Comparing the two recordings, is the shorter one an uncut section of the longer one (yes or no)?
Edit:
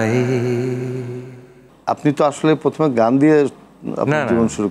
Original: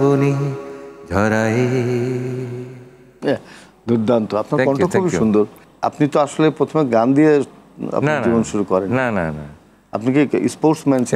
no